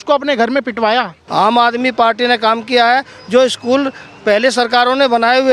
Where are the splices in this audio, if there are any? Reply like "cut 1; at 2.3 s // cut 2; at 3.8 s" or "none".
cut 1; at 1.2 s